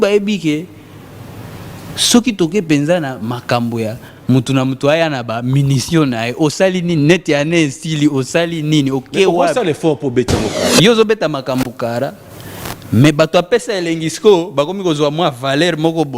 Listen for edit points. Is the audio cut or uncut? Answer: cut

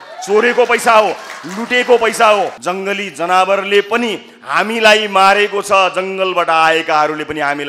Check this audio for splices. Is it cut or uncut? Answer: cut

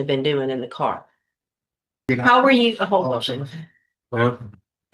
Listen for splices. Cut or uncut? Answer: cut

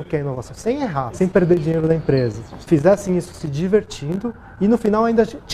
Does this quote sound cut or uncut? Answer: cut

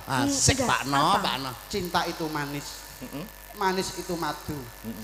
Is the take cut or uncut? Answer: uncut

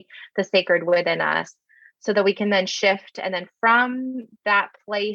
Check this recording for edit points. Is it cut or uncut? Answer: uncut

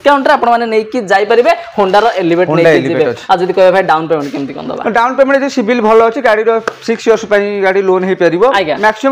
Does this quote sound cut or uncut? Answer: uncut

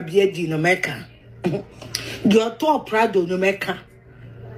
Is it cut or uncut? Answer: uncut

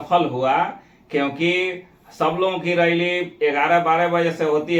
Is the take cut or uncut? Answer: uncut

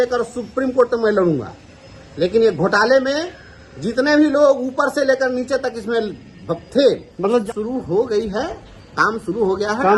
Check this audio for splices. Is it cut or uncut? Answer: uncut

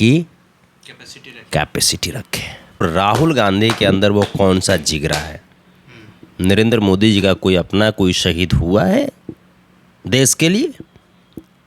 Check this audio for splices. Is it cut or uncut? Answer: cut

